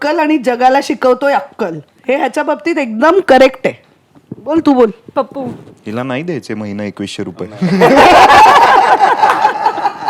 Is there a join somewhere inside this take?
no; 0 cuts

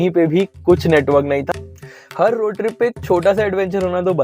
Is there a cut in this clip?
yes; 1 cut; at 1.5 s

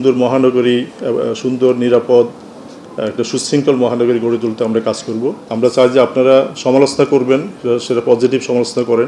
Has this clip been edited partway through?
yes; 1 cut; at 5.4 s

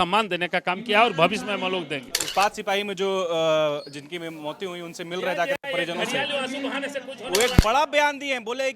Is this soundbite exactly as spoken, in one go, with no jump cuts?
no; 1 cut; at 2.2 s

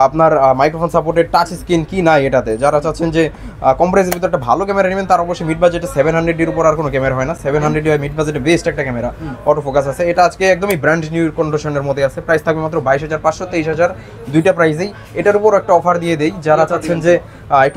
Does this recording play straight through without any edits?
yes; 0 cuts

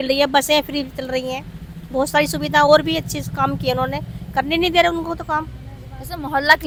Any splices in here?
no; 0 cuts

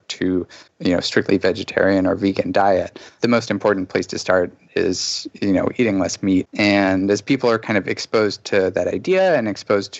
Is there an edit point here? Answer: no; 0 cuts

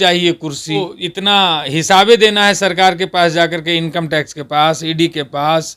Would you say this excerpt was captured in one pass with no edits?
no; 1 cut; at 0.9 s

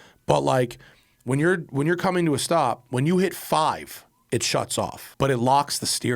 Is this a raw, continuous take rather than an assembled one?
no; 1 cut; at 5.0 s

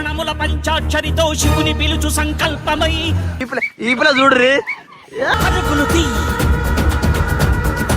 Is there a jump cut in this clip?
yes; 1 cut; at 3.3 s

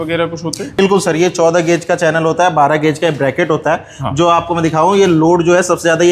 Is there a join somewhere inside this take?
no; 0 cuts

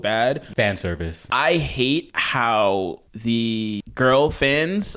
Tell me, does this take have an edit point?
yes; 4 cuts; at 0.7 s, 2.2 s, 3.1 s, 3.8 s

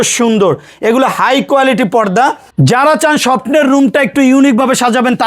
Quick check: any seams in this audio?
yes; 1 cut; at 2.5 s

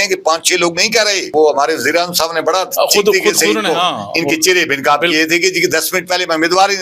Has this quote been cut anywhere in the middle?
yes; 1 cut; at 1.3 s

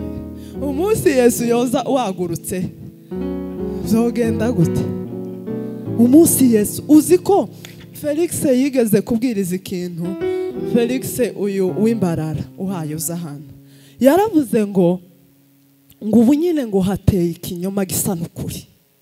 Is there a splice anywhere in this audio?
no; 0 cuts

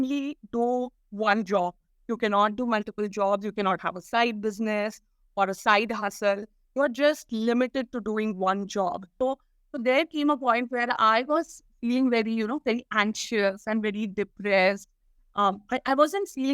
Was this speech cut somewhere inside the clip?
yes; 1 cut; at 9.2 s

